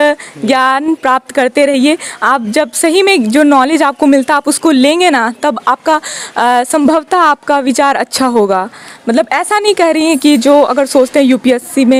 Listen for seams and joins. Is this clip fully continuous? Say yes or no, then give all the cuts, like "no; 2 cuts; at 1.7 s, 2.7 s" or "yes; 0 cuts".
yes; 0 cuts